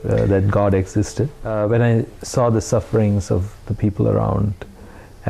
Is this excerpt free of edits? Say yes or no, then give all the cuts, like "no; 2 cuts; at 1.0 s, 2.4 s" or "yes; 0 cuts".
no; 1 cut; at 1.4 s